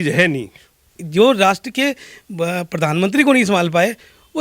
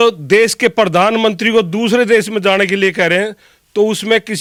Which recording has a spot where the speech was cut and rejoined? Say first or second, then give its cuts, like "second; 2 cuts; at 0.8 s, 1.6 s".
first; 1 cut; at 1.0 s